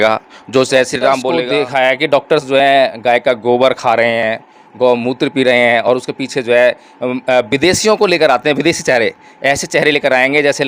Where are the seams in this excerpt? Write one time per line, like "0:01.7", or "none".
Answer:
0:01.3